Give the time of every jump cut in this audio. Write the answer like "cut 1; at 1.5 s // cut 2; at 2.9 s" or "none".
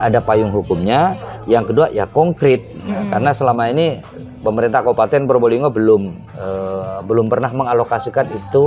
none